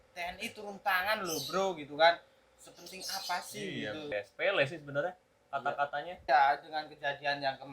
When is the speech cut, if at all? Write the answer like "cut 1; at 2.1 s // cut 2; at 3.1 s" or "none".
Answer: cut 1; at 4.1 s // cut 2; at 6.2 s